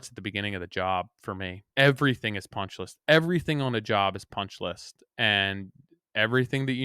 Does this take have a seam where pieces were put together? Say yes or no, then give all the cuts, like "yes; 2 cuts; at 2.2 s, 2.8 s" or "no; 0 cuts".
yes; 1 cut; at 1.7 s